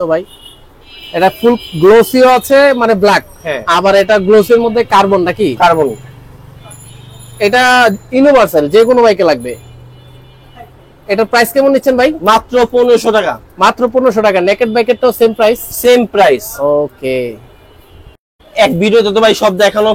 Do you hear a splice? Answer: no; 0 cuts

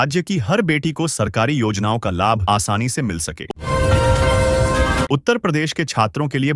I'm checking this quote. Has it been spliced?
yes; 2 cuts; at 3.4 s, 5.1 s

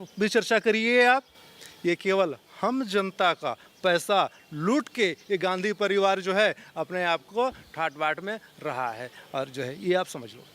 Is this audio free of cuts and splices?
yes; 0 cuts

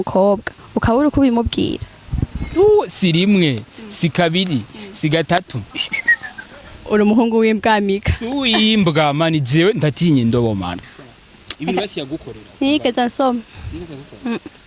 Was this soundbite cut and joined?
yes; 2 cuts; at 5.6 s, 10.7 s

